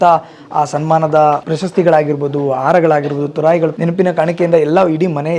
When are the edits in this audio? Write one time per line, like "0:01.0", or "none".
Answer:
0:01.5
0:03.8

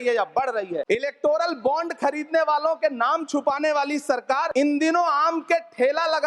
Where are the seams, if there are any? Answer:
0:00.8
0:04.5

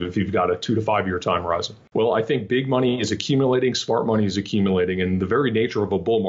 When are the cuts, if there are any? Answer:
0:01.9

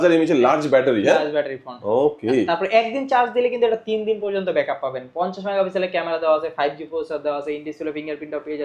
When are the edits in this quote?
none

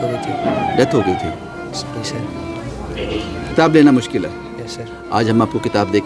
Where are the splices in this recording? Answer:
0:03.5

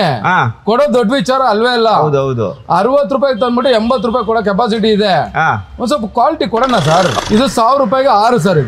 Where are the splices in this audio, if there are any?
0:07.1

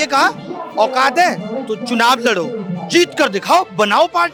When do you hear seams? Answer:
none

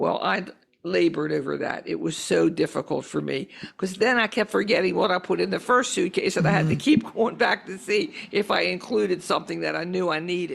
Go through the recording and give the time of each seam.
none

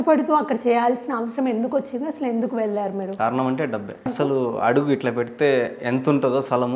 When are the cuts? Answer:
0:03.2
0:04.1

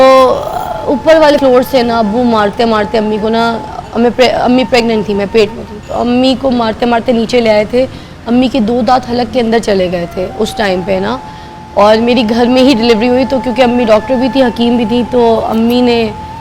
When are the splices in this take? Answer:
0:01.3

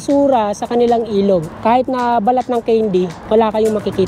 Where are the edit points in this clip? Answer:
0:01.5
0:03.2

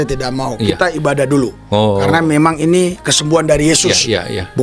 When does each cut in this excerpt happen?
none

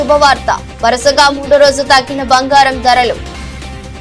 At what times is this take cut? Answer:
none

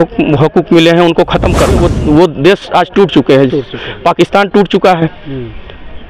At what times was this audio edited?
0:01.9

